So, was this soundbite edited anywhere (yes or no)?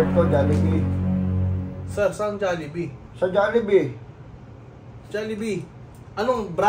no